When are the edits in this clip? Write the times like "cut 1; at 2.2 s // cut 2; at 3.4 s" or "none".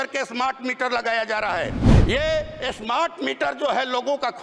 cut 1; at 1.8 s

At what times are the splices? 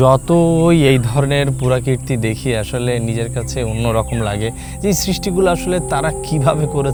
none

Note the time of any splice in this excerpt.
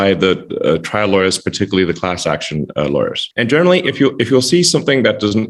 cut 1; at 3.2 s

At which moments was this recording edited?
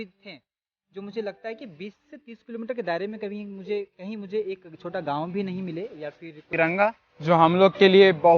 cut 1; at 6.5 s

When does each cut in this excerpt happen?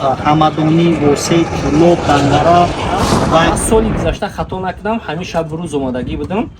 cut 1; at 3.6 s

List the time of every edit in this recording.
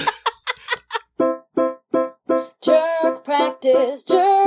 cut 1; at 1.1 s

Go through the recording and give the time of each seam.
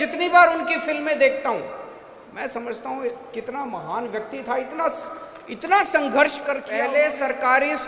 cut 1; at 6.7 s

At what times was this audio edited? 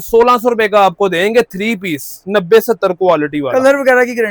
none

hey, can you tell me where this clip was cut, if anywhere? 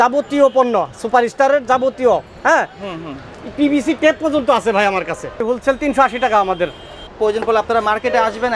cut 1; at 5.4 s // cut 2; at 7.1 s

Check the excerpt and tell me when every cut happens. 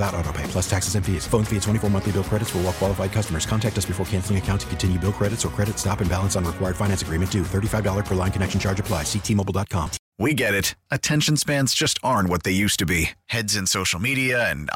cut 1; at 10.0 s

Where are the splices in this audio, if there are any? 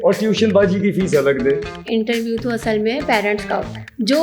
cut 1; at 1.7 s

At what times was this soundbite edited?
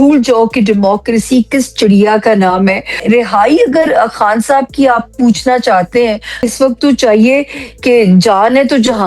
cut 1; at 3.0 s // cut 2; at 6.5 s

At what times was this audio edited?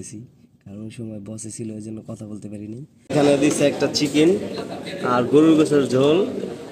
cut 1; at 3.1 s

